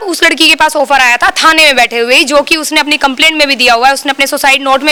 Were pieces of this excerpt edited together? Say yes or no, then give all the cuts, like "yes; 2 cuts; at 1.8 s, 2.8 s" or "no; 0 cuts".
no; 0 cuts